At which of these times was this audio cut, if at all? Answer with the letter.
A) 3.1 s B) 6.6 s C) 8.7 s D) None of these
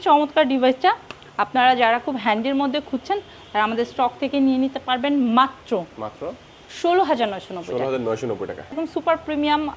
C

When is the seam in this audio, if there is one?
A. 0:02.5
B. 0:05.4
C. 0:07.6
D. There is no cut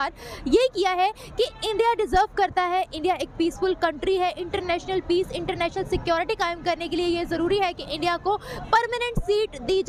D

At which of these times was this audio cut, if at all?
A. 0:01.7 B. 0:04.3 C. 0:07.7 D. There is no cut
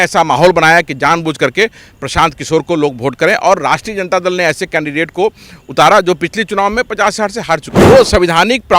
C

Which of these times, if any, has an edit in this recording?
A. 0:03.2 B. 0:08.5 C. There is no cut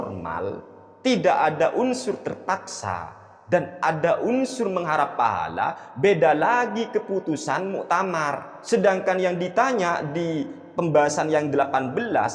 B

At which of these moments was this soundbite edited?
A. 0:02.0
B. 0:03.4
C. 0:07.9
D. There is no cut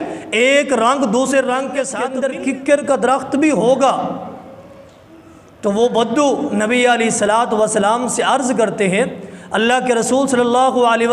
A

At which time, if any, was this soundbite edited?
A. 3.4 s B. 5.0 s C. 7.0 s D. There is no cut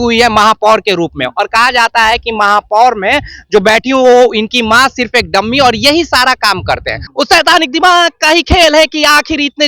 C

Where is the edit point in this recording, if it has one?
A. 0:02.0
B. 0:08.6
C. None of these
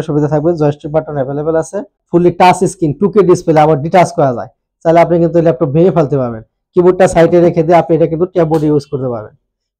A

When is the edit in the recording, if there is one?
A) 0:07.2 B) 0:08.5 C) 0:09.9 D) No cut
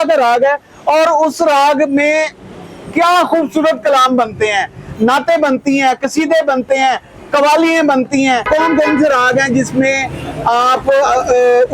B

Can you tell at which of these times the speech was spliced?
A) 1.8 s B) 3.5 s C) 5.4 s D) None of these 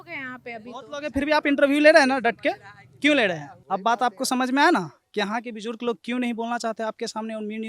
B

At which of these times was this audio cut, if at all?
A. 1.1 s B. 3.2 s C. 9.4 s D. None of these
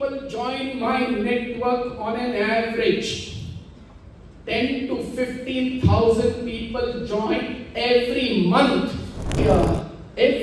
C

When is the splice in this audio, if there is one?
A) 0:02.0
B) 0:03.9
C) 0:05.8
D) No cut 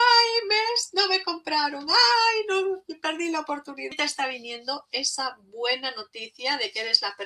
B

